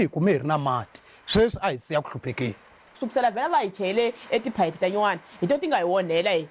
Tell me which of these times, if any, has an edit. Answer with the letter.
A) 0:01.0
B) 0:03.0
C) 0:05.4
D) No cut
B